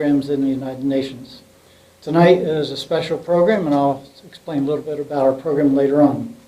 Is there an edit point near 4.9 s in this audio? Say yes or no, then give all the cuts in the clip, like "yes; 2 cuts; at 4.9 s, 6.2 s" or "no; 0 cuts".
no; 1 cut; at 1.9 s